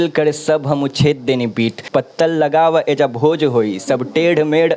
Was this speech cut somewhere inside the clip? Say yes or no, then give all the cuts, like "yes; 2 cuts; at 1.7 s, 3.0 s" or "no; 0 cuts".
yes; 1 cut; at 1.8 s